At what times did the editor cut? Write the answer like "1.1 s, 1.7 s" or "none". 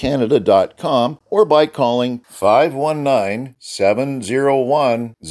1.2 s